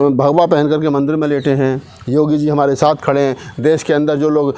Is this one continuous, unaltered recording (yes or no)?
yes